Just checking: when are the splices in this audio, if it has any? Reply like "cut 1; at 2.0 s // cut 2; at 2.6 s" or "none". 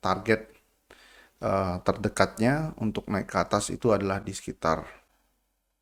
none